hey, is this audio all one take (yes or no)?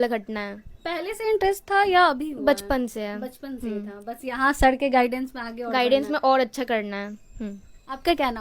yes